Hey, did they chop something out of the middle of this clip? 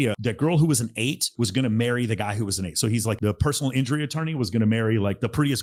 no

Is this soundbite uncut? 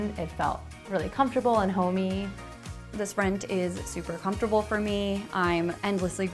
no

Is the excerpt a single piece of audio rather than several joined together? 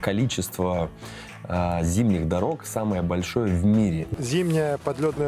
no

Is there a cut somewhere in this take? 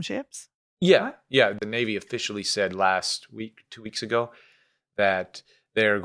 yes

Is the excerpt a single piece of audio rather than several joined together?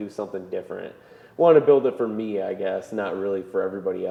yes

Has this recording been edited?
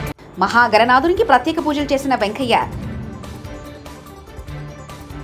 no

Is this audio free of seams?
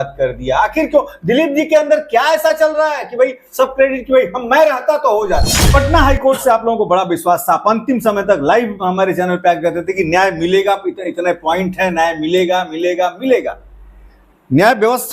no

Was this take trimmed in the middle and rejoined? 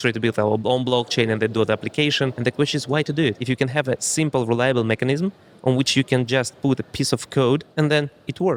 yes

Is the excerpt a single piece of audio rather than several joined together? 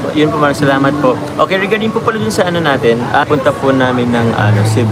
no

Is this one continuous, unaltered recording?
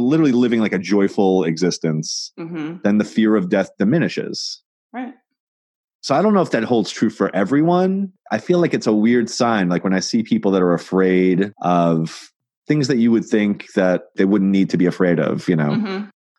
yes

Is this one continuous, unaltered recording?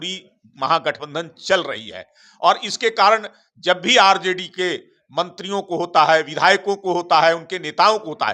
yes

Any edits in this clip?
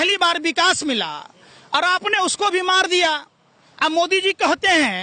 no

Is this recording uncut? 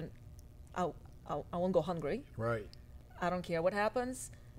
no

